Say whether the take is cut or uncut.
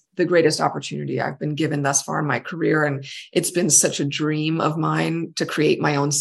uncut